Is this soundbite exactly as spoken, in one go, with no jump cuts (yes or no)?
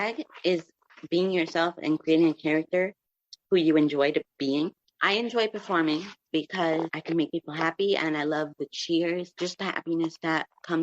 yes